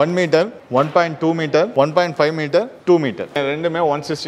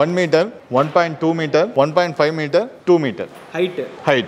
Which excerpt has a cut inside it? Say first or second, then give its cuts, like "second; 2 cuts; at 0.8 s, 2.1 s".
first; 1 cut; at 3.4 s